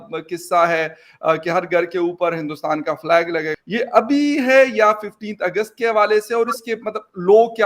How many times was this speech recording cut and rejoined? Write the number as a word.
one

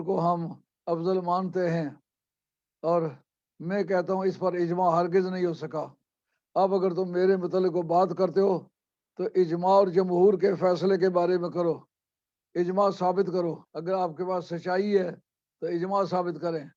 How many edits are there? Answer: one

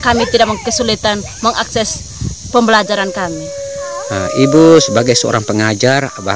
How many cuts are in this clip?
zero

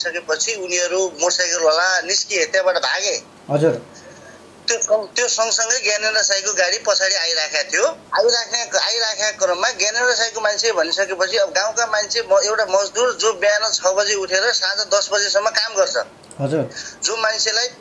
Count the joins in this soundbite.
zero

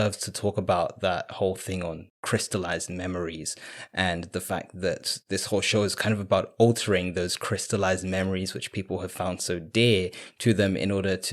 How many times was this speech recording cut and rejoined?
zero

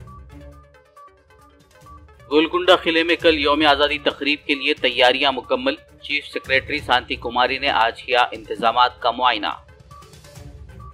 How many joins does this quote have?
two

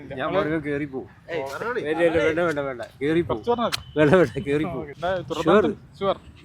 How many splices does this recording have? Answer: one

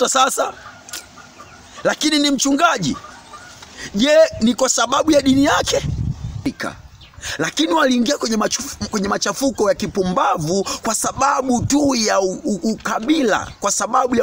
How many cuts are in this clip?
one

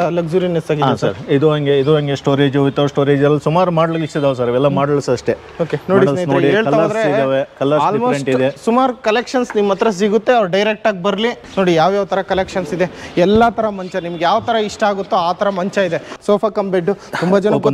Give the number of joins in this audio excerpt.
two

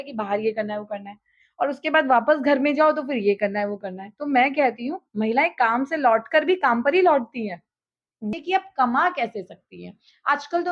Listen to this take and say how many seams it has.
one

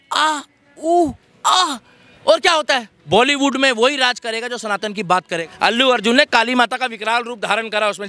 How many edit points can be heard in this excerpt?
two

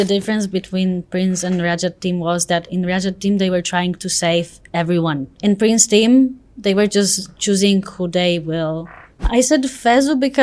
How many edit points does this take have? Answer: two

